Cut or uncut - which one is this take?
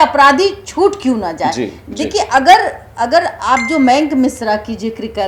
uncut